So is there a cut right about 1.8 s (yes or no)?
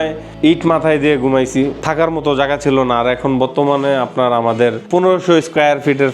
yes